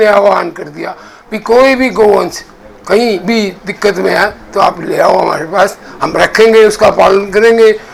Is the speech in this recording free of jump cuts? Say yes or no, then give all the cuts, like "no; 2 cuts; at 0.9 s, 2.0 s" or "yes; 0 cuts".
yes; 0 cuts